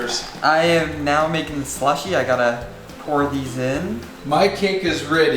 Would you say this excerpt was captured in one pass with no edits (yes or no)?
no